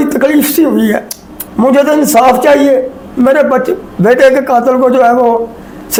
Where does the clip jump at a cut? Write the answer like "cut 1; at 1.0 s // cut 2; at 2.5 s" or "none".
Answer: none